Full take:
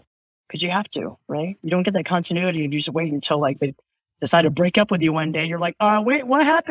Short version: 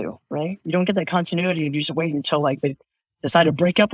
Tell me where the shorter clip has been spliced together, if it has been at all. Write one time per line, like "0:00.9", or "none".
none